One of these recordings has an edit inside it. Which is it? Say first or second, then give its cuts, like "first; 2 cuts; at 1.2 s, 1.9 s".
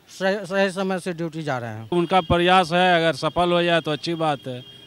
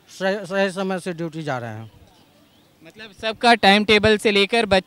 first; 1 cut; at 1.9 s